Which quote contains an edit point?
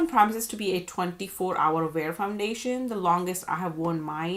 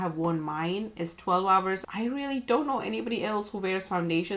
second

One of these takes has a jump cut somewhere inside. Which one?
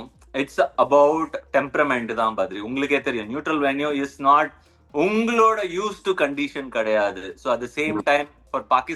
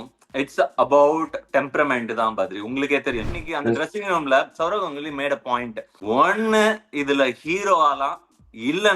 second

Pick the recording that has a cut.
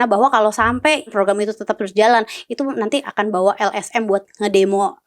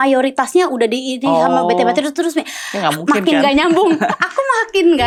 first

